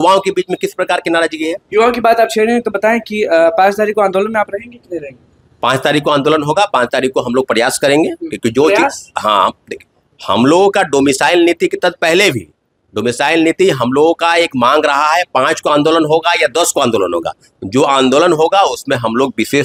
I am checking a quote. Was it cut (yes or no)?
no